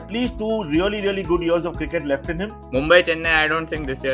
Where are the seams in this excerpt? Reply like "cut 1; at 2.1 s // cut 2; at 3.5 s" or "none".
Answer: cut 1; at 2.6 s